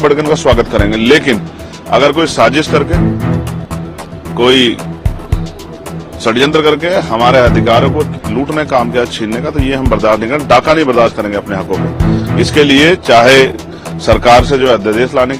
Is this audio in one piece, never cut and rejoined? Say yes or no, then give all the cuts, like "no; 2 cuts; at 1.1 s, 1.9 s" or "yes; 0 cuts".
yes; 0 cuts